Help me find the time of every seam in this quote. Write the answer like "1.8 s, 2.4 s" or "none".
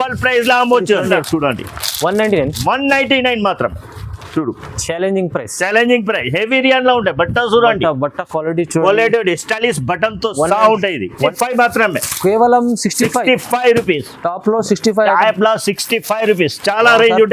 1.2 s, 11.2 s